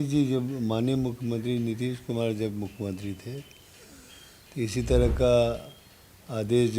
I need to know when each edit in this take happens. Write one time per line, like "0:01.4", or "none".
none